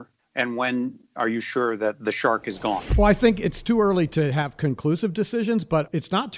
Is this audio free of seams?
no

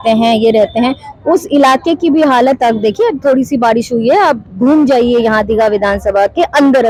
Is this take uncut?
yes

